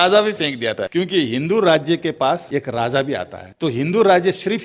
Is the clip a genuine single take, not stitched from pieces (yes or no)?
no